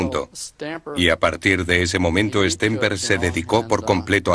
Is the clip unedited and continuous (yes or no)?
yes